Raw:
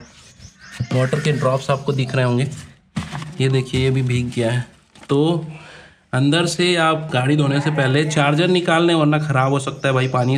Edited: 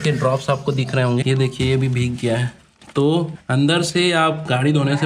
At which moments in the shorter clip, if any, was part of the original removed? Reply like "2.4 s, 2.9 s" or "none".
1.2 s, 3.4 s